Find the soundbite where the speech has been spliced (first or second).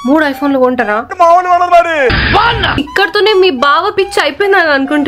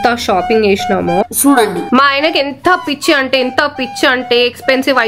first